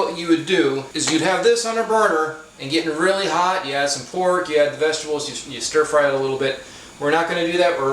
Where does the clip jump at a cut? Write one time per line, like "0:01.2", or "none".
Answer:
0:00.9